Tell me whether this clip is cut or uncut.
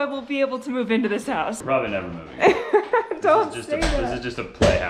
cut